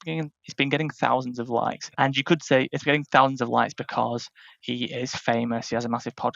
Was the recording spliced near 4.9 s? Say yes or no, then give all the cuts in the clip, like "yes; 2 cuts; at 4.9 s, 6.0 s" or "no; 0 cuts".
no; 1 cut; at 1.8 s